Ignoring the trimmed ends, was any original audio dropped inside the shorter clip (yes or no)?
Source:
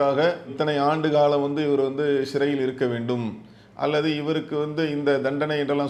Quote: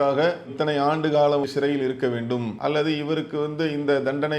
yes